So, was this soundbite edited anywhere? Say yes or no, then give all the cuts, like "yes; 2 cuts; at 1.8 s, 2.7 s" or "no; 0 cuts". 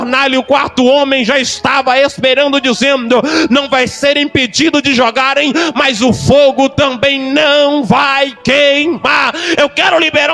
no; 0 cuts